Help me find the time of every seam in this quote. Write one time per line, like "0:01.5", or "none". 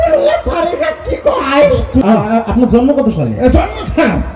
0:02.2